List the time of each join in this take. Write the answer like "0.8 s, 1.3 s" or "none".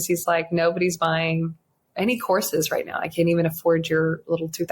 none

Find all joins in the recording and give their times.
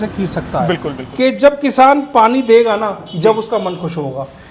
1.0 s

